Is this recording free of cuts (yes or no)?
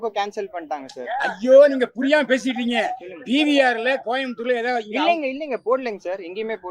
yes